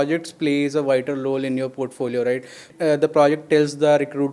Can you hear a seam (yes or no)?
yes